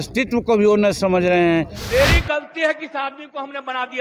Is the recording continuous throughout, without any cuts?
no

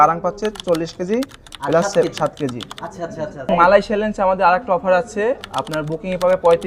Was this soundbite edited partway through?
yes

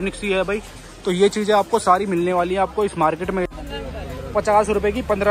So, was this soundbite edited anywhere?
yes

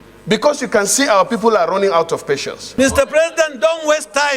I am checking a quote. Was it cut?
yes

